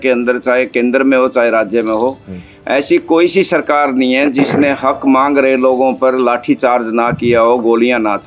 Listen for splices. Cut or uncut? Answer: uncut